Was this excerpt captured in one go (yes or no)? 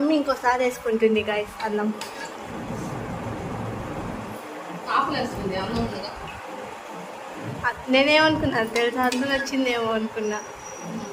yes